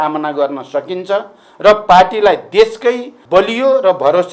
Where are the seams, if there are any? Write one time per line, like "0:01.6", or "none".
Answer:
0:03.1